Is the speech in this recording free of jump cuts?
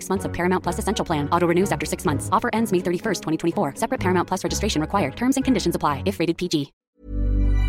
no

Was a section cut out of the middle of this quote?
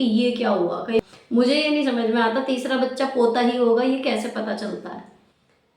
yes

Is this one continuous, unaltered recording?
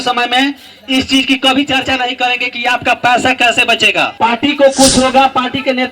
no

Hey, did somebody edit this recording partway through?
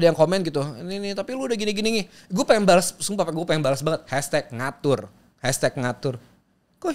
no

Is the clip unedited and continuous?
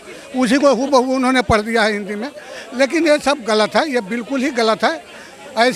yes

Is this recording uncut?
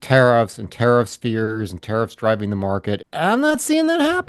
no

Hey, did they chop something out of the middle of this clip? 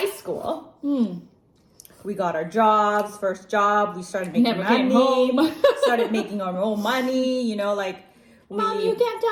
no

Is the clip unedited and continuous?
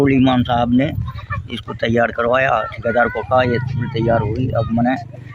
yes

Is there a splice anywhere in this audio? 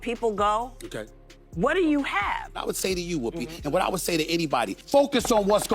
yes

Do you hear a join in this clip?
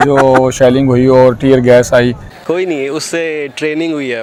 no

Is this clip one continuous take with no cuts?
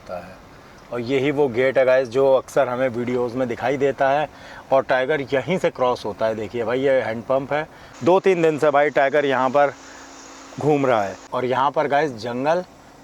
no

